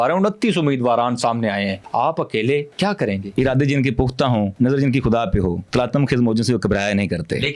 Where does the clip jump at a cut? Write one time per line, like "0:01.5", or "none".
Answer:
0:01.8
0:03.0
0:04.5
0:05.6